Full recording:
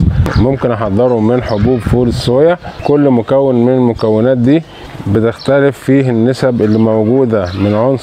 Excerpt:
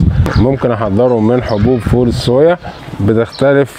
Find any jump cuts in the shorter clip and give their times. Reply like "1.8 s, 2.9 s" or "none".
2.7 s